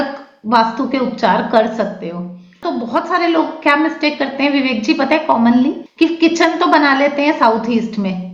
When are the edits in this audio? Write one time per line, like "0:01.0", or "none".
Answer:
0:02.6
0:05.8